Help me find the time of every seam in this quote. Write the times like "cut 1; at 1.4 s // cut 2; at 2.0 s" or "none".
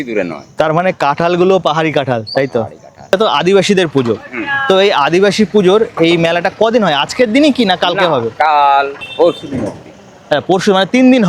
cut 1; at 3.1 s // cut 2; at 9.0 s